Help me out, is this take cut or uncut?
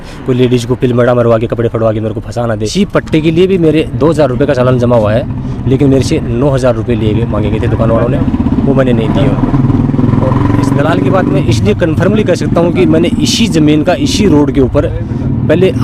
cut